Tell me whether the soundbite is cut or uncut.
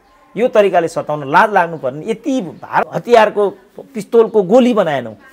cut